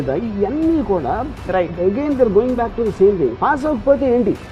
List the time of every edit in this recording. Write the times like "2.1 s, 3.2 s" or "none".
none